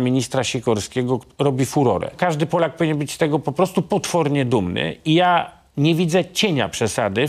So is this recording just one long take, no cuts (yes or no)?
no